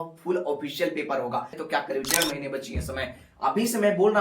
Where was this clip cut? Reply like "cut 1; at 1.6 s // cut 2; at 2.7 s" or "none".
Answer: cut 1; at 1.6 s